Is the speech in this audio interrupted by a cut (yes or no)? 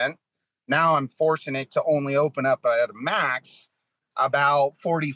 no